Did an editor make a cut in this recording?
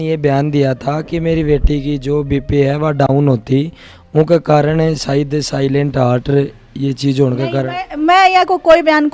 no; 0 cuts

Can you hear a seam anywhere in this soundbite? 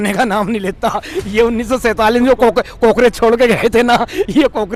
no; 0 cuts

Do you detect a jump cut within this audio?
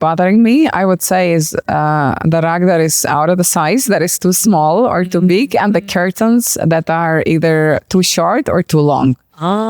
no; 0 cuts

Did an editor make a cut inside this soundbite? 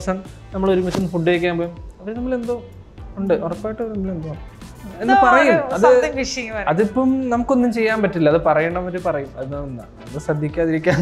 no; 0 cuts

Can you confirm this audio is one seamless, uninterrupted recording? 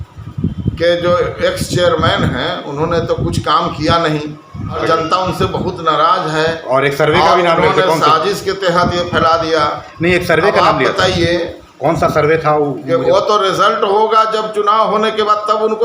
no; 1 cut; at 4.8 s

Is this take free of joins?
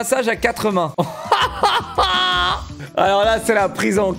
yes; 0 cuts

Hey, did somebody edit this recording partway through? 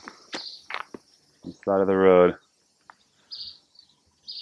no; 0 cuts

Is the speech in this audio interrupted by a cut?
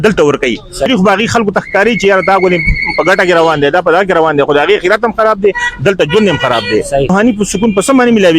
yes; 2 cuts; at 0.9 s, 7.1 s

